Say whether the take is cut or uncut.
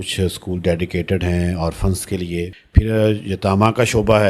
cut